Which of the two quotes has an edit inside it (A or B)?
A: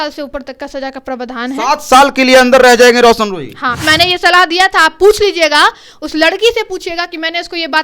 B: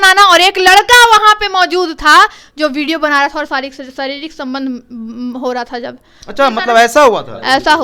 A